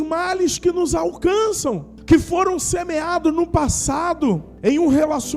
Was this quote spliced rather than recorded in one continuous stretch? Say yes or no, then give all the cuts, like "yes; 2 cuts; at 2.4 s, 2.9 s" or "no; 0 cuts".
yes; 2 cuts; at 1.9 s, 4.5 s